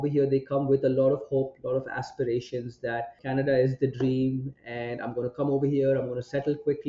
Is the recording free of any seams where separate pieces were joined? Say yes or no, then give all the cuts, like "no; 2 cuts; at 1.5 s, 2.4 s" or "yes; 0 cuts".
no; 1 cut; at 3.2 s